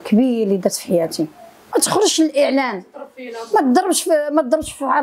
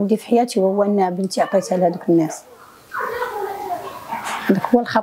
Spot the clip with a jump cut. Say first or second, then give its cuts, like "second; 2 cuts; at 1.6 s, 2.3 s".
first; 1 cut; at 1.6 s